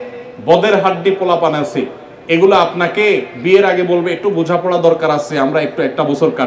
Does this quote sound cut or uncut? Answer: uncut